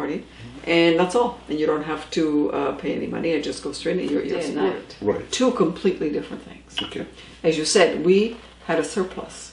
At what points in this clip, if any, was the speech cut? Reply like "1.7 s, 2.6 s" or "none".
5.2 s

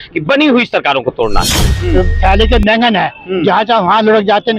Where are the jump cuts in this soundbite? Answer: 1.8 s

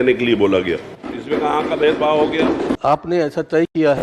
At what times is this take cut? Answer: 2.8 s

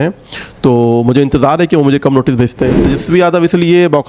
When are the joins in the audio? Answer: 2.9 s

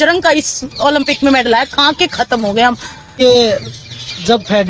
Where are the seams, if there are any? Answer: 3.2 s

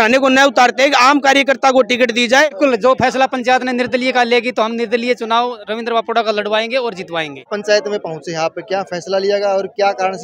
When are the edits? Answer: 2.5 s, 7.4 s

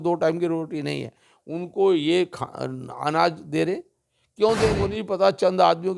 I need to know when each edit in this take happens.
4.8 s

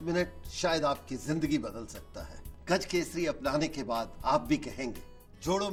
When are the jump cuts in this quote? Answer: none

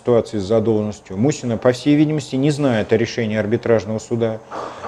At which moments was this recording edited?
none

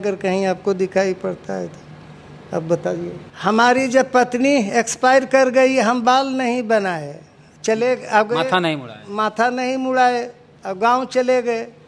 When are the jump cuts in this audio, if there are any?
3.2 s

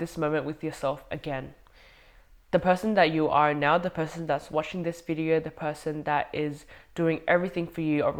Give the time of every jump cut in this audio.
none

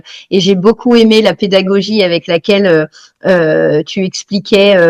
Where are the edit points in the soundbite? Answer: none

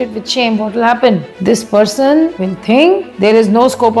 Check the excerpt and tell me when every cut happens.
1.3 s, 2.5 s, 3.1 s

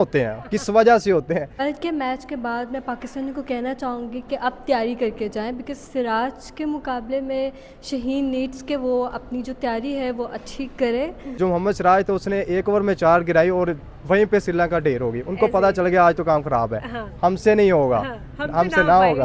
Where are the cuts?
1.5 s, 11.2 s

